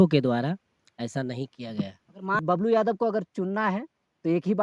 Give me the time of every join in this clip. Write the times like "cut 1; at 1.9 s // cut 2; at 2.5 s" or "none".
cut 1; at 2.4 s